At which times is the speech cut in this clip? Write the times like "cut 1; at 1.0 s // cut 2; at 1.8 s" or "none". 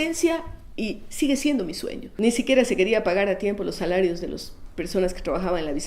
cut 1; at 2.0 s